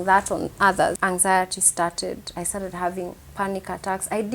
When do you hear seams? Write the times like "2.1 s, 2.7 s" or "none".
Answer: 1.0 s